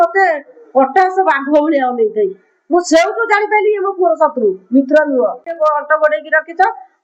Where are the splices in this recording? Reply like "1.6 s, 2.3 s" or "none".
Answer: 5.4 s